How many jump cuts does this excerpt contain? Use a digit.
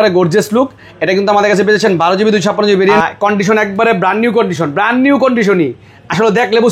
1